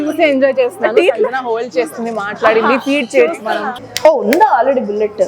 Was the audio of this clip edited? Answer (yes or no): yes